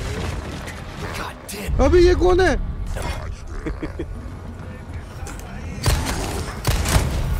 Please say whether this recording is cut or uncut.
uncut